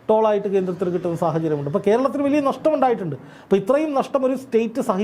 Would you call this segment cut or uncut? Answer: uncut